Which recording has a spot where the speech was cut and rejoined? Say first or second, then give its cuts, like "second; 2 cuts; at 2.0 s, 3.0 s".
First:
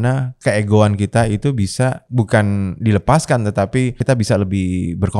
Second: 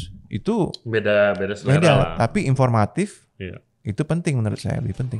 first; 2 cuts; at 2.0 s, 4.0 s